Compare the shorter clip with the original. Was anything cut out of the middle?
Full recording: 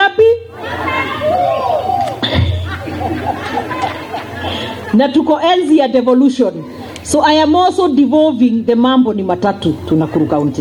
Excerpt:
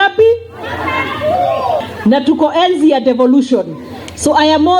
yes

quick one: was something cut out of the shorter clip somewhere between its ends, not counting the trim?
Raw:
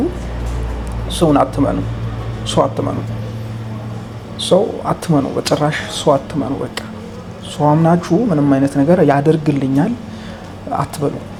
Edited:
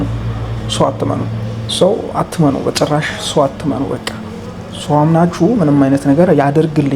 yes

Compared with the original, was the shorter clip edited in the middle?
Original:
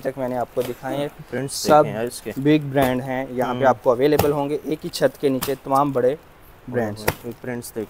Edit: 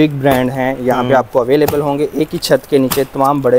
no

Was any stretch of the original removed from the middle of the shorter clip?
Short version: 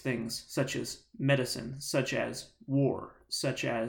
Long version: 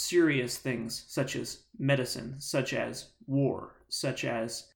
no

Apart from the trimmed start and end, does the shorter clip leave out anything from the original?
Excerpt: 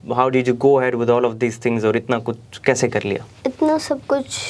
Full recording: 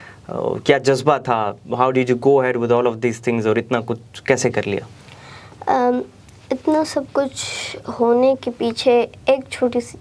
yes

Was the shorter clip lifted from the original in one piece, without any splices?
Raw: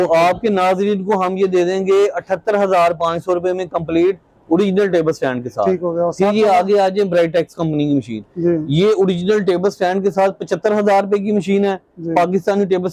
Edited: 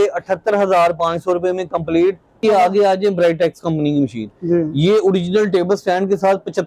no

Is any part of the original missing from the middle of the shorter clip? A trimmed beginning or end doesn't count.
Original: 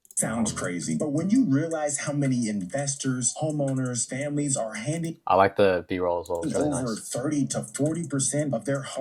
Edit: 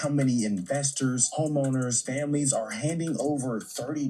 yes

